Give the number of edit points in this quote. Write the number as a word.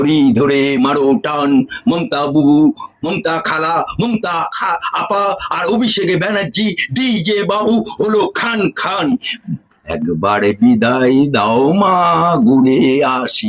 one